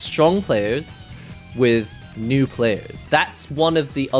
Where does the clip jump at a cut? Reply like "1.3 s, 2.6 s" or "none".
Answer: 2.9 s